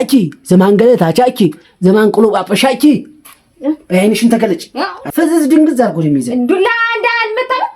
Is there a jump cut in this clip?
yes; 1 cut; at 5.0 s

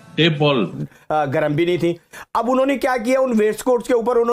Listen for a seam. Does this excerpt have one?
yes; 1 cut; at 0.9 s

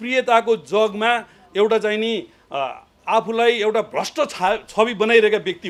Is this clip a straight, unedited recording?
yes; 0 cuts

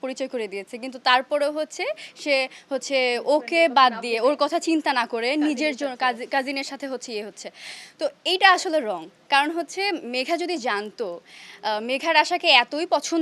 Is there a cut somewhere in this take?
no; 0 cuts

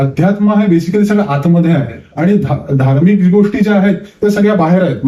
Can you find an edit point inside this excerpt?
yes; 1 cut; at 2.0 s

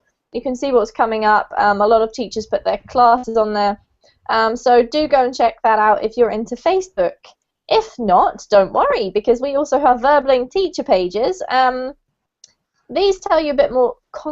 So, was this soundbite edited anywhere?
yes; 1 cut; at 11.7 s

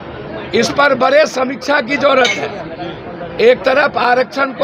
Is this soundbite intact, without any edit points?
yes; 0 cuts

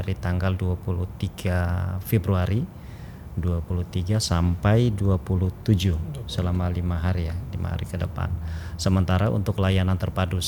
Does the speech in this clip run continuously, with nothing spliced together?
yes; 0 cuts

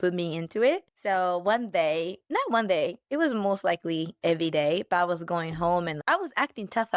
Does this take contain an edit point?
yes; 3 cuts; at 0.9 s, 2.2 s, 3.0 s

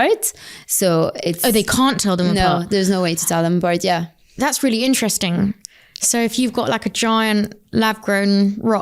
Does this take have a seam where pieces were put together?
no; 0 cuts

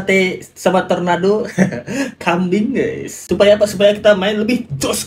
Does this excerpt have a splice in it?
no; 0 cuts

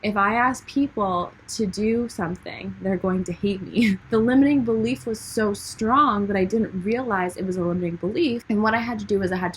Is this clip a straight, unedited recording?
no; 2 cuts; at 4.0 s, 8.4 s

